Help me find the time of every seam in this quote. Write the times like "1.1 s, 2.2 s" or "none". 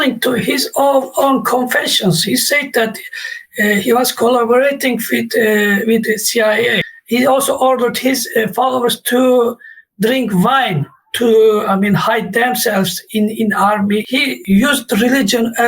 6.8 s, 14.2 s